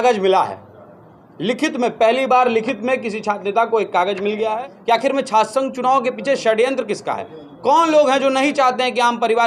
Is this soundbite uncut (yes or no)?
no